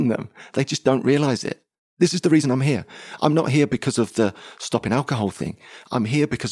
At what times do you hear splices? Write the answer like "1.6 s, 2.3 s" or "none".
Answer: 1.9 s

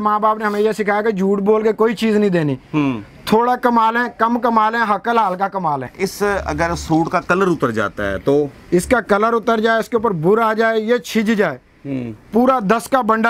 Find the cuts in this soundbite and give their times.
5.9 s

